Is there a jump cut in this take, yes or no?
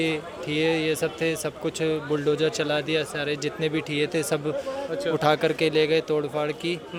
no